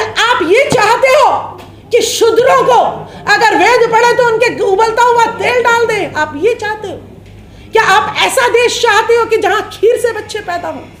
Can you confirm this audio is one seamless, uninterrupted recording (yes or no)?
yes